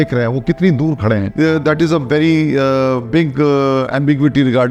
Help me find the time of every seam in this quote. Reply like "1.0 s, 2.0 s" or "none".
none